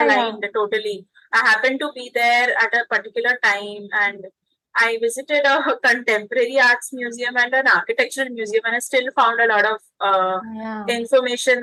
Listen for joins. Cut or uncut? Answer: uncut